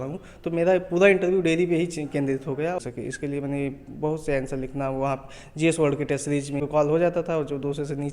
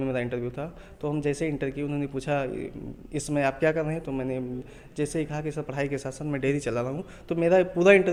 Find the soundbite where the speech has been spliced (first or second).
first